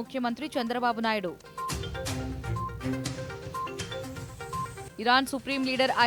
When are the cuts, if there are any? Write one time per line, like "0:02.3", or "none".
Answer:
none